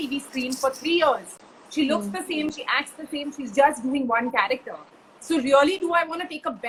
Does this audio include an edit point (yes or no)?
no